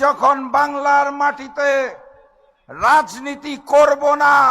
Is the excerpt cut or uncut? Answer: uncut